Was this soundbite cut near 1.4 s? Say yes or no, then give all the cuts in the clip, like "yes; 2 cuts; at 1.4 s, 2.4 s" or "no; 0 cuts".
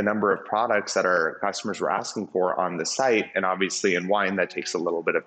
yes; 1 cut; at 1.4 s